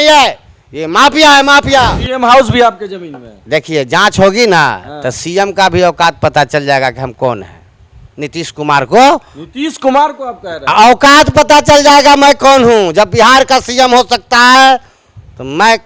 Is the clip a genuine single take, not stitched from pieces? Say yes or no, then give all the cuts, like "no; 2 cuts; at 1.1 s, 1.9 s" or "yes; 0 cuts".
no; 1 cut; at 2.0 s